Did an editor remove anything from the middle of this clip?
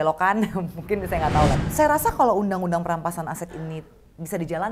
yes; 1 cut; at 1.6 s

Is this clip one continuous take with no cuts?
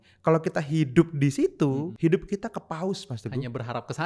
no; 1 cut; at 1.9 s

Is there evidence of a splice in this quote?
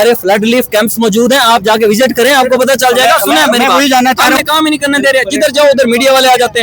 yes; 1 cut; at 4.4 s

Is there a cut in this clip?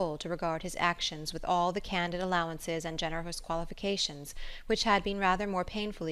no; 0 cuts

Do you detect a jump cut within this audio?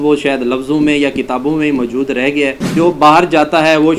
yes; 1 cut; at 2.7 s

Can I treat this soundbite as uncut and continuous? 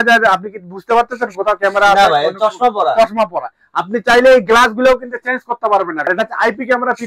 no; 1 cut; at 6.0 s

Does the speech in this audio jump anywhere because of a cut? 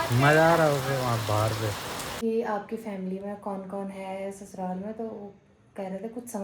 yes; 1 cut; at 2.1 s

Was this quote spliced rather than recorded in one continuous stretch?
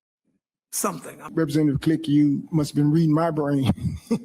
yes; 1 cut; at 1.2 s

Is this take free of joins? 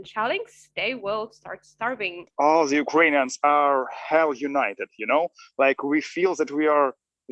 no; 1 cut; at 2.3 s

